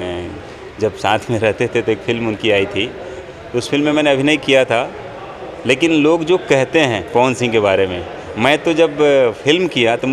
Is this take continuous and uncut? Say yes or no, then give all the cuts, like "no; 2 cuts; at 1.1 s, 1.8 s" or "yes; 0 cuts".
no; 1 cut; at 3.2 s